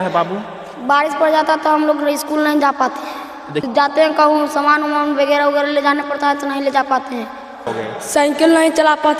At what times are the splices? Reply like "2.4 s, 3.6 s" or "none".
3.7 s, 7.7 s